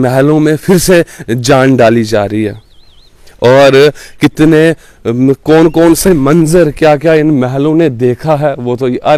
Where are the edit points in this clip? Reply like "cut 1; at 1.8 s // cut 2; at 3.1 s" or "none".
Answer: none